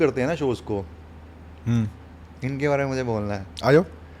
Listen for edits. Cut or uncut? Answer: uncut